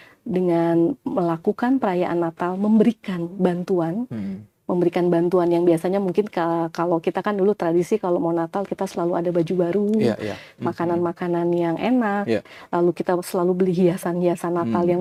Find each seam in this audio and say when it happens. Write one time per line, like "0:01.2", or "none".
none